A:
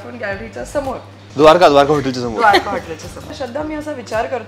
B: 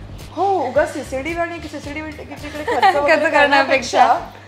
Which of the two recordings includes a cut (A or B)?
A